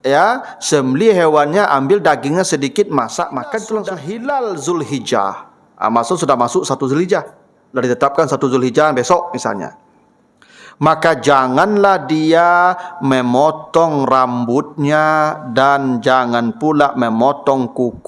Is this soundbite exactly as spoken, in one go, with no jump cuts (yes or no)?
no